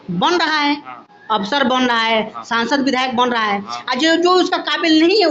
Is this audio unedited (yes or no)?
yes